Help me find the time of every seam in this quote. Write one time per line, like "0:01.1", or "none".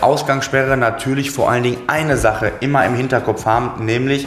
none